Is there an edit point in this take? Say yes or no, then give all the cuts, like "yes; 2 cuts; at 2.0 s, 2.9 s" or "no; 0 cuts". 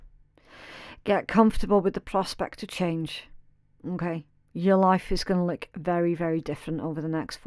no; 0 cuts